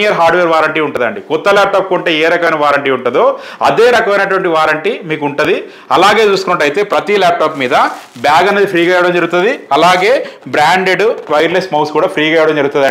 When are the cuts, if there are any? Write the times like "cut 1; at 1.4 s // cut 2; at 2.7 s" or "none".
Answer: none